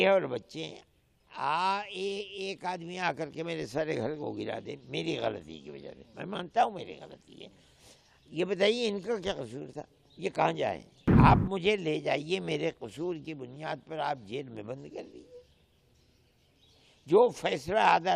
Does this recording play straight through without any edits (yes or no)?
no